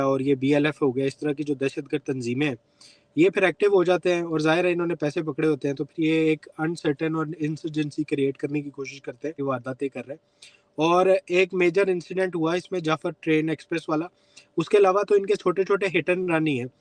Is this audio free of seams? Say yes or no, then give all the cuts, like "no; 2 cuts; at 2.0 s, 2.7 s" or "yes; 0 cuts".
no; 1 cut; at 9.4 s